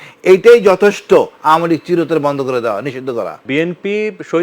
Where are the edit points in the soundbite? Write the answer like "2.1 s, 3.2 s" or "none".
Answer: 3.4 s